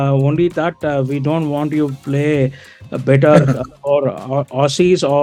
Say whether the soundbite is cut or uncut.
uncut